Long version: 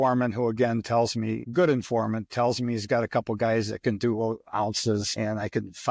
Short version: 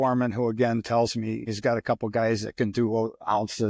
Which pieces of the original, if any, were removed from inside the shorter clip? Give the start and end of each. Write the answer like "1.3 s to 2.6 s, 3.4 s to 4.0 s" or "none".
1.5 s to 2.7 s

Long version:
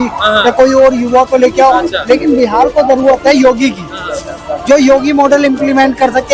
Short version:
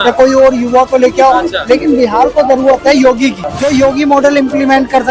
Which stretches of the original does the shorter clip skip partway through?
3.9 s to 4.5 s

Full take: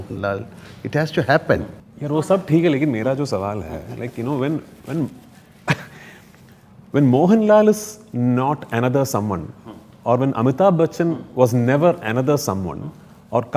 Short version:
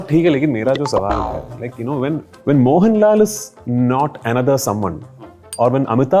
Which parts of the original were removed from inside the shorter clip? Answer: 4.7 s to 6.8 s

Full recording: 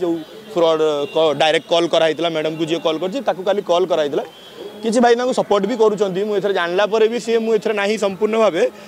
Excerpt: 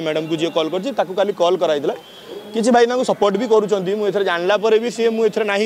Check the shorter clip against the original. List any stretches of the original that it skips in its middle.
none

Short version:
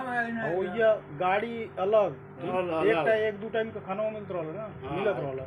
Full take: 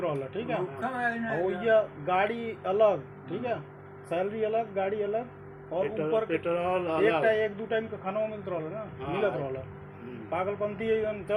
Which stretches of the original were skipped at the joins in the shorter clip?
3.4 s to 6.7 s

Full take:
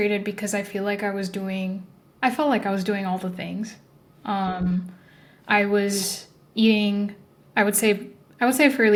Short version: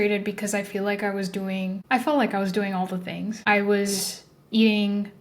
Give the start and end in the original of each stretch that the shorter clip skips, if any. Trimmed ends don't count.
1.8 s to 2.1 s, 3.7 s to 5.4 s

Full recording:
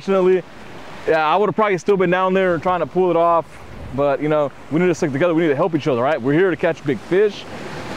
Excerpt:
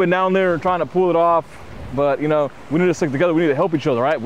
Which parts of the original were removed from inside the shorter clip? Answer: none

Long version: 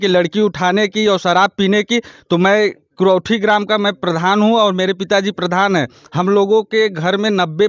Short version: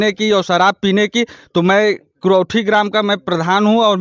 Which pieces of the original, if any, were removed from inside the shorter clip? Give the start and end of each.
none

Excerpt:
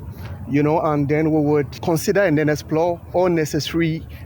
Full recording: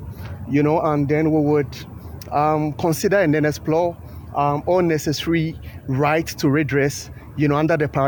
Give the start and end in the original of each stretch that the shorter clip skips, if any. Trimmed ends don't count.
1.8 s to 2.7 s, 4.0 s to 4.6 s

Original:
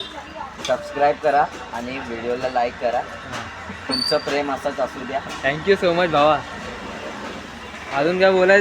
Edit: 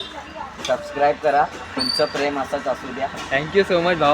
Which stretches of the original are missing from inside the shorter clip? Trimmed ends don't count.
1.6 s to 3.7 s

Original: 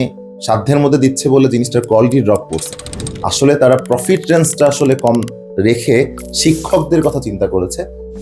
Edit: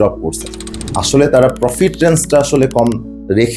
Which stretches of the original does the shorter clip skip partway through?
none

